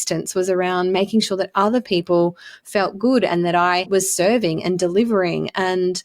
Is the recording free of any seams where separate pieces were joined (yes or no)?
no